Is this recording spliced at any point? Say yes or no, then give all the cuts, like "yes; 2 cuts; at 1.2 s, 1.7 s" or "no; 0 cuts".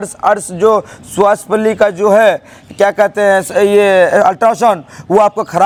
no; 0 cuts